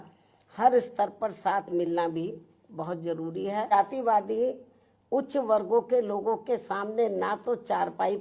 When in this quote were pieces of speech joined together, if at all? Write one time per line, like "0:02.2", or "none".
0:03.7